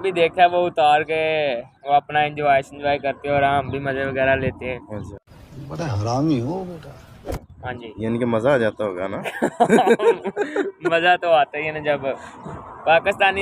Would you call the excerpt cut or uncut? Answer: uncut